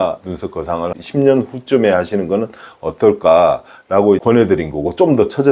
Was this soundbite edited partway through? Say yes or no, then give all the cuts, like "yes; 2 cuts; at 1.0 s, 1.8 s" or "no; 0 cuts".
yes; 1 cut; at 4.2 s